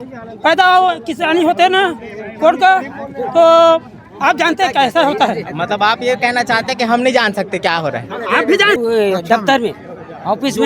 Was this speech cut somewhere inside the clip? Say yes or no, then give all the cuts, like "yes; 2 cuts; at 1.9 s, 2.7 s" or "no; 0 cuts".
yes; 1 cut; at 8.8 s